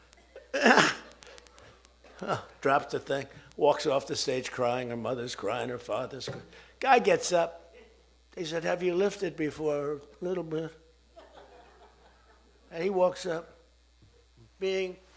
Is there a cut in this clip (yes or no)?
no